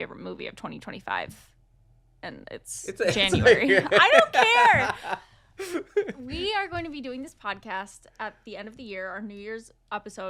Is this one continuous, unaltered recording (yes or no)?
yes